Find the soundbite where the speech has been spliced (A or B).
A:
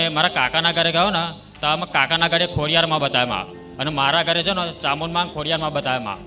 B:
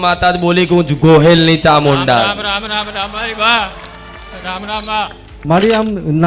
B